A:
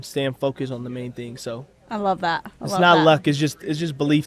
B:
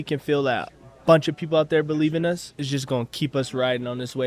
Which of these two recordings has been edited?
B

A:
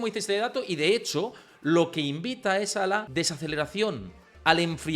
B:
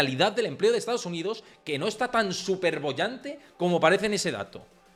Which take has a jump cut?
A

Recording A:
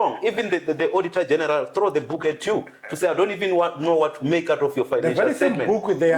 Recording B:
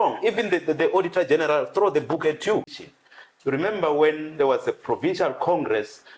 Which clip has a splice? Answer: B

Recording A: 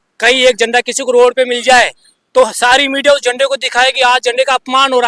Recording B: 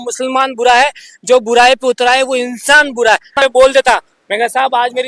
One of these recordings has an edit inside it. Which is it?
B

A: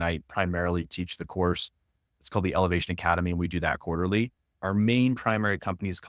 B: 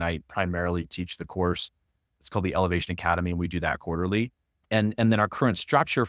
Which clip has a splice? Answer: A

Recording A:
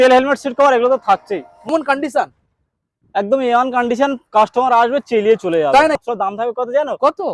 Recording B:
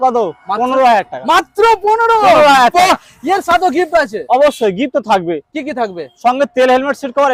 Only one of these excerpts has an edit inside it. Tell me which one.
A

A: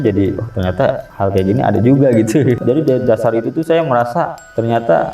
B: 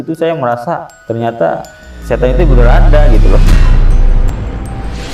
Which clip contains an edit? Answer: A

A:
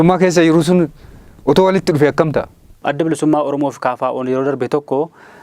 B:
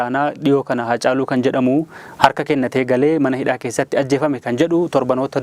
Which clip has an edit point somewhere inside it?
A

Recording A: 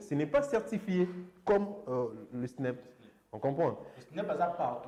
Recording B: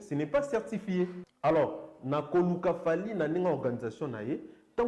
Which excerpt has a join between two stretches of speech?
B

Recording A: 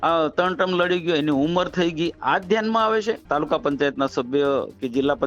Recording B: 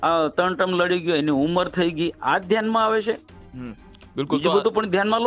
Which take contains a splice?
A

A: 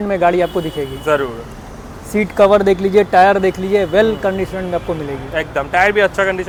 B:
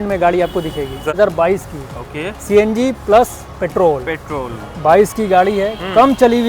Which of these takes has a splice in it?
B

